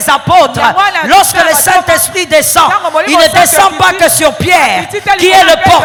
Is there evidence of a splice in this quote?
no; 0 cuts

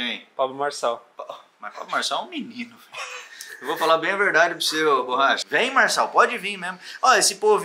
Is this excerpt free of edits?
no; 2 cuts; at 1.1 s, 5.4 s

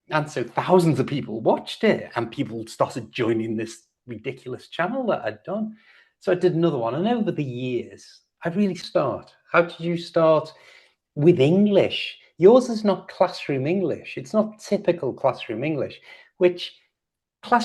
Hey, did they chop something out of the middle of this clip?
yes; 1 cut; at 8.8 s

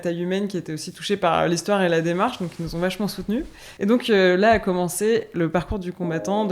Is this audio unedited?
no; 1 cut; at 3.6 s

